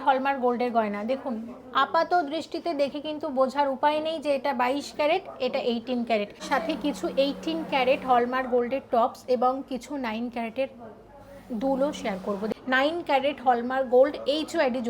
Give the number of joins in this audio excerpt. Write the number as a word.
two